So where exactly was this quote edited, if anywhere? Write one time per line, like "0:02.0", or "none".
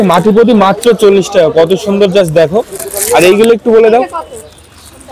none